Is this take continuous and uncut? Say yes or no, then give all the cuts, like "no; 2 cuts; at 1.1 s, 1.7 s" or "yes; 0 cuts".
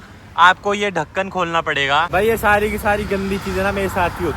no; 1 cut; at 2.1 s